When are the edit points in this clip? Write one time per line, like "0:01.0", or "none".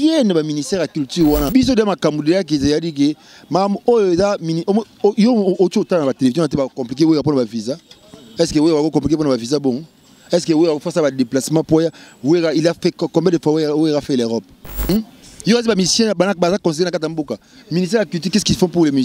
0:01.5
0:14.9